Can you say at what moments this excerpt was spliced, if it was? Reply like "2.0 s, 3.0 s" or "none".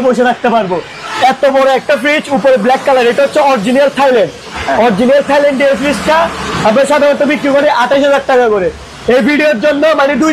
none

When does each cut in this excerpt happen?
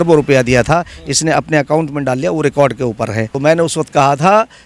3.2 s

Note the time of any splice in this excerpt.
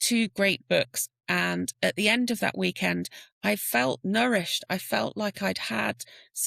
1.1 s

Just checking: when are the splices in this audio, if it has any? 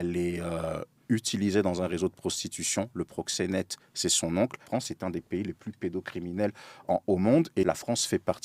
4.6 s, 7.6 s

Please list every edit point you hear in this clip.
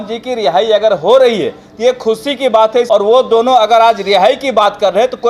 2.9 s

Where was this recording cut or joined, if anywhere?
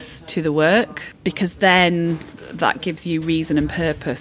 1.0 s, 2.4 s

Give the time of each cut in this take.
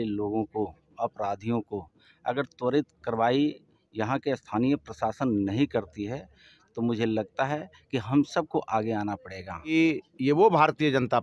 9.7 s

